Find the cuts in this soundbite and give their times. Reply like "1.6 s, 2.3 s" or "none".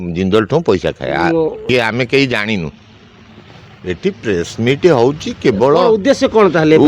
1.6 s